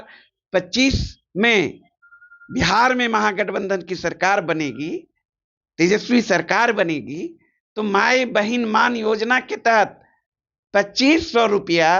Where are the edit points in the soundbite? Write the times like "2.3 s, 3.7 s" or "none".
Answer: 1.2 s